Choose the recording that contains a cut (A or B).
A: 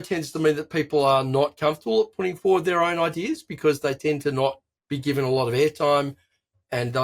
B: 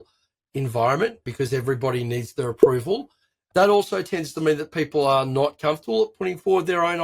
B